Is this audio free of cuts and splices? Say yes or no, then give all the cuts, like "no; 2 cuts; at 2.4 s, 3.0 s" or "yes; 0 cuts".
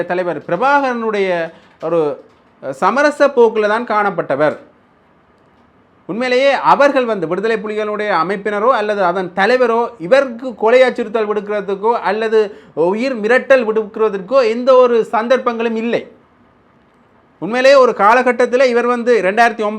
yes; 0 cuts